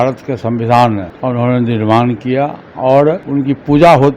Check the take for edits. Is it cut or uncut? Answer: cut